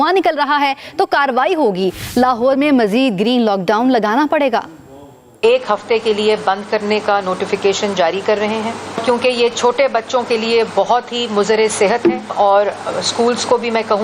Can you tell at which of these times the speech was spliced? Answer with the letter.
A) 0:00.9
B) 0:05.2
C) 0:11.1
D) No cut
B